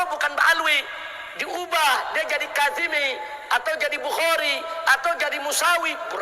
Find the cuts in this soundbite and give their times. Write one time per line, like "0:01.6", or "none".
none